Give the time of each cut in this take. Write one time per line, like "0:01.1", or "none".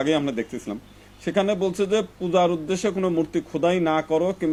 none